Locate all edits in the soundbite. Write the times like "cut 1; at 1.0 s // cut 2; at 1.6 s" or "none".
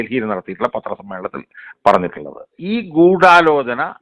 cut 1; at 2.5 s